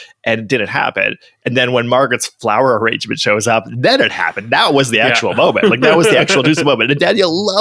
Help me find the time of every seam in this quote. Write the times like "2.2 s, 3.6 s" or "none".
none